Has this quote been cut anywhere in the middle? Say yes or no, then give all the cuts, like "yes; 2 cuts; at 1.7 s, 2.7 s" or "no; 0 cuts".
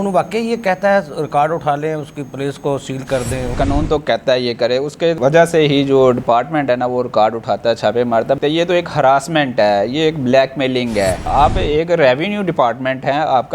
yes; 2 cuts; at 8.4 s, 11.2 s